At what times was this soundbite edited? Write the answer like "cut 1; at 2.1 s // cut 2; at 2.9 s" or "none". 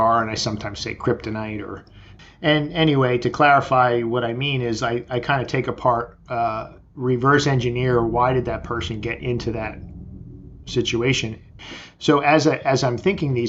cut 1; at 2.1 s // cut 2; at 11.5 s

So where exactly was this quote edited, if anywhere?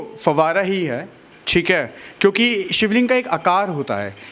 none

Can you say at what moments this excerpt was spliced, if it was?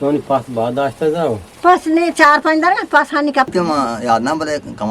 cut 1; at 3.5 s

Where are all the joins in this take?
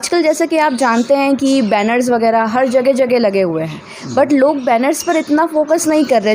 none

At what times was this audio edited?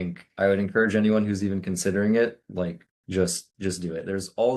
none

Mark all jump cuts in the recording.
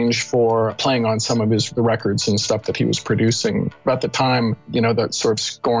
cut 1; at 1.7 s // cut 2; at 3.8 s // cut 3; at 4.6 s

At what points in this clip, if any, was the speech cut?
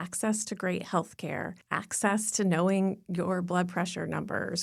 cut 1; at 1.6 s

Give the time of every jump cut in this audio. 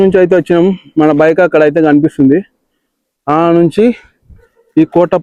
none

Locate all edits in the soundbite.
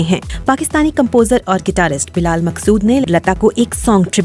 cut 1; at 3.1 s

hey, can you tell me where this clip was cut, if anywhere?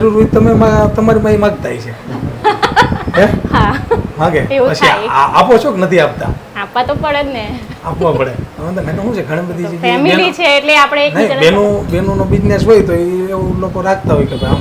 none

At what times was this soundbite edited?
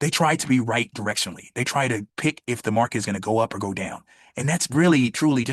none

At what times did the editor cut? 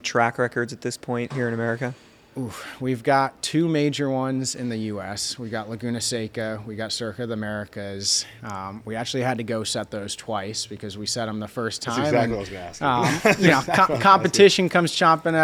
none

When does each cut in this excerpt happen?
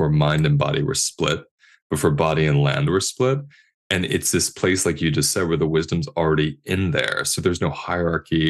none

